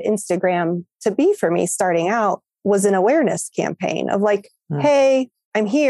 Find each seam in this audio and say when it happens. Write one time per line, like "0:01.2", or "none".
none